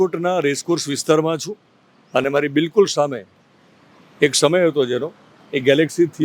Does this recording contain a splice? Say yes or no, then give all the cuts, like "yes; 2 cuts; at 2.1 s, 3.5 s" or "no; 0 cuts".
no; 0 cuts